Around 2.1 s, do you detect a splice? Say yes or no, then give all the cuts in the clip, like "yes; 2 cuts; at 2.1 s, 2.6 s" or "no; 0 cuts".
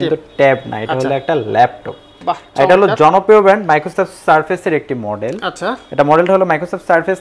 no; 0 cuts